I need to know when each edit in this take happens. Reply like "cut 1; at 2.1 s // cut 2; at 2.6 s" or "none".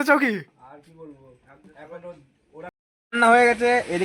cut 1; at 2.7 s